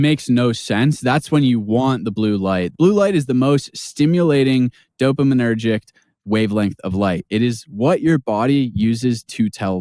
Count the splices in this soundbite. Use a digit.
1